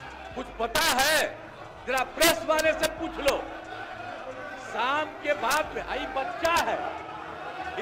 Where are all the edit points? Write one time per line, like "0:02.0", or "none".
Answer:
none